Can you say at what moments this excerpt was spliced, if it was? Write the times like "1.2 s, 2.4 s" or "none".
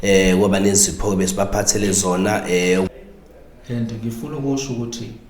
2.9 s